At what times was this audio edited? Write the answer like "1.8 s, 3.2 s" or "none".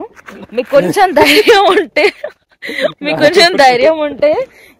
none